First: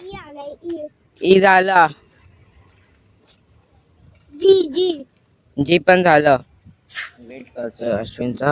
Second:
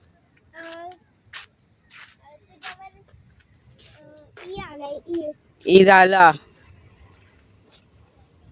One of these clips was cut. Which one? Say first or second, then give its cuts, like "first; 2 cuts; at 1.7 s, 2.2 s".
first; 1 cut; at 7.4 s